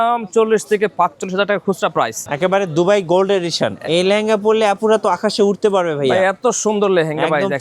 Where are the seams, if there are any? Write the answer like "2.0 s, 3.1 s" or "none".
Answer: 2.3 s, 3.7 s